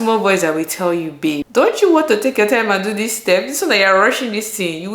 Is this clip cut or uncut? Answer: cut